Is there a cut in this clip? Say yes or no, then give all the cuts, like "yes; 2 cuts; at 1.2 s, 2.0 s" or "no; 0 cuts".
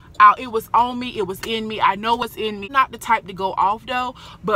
yes; 1 cut; at 2.7 s